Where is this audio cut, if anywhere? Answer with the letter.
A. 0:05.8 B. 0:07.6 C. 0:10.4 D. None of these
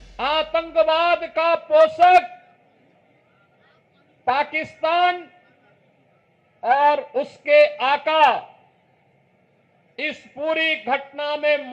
D